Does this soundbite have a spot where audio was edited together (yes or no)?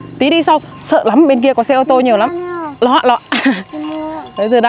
no